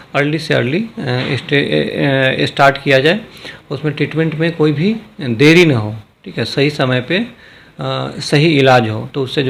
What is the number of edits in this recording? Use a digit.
0